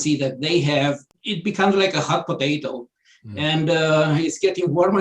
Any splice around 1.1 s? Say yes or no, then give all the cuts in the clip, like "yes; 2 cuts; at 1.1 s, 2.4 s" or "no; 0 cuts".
yes; 1 cut; at 1.1 s